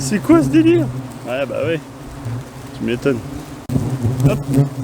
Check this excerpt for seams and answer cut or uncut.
cut